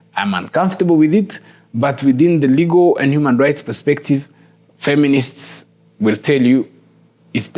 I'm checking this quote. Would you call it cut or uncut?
uncut